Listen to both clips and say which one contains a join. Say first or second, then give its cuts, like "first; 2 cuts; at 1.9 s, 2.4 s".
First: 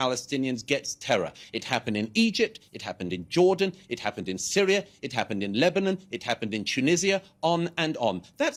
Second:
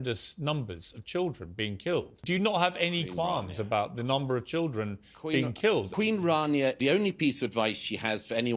second; 3 cuts; at 2.1 s, 5.9 s, 6.8 s